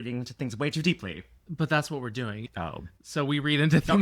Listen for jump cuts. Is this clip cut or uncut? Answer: cut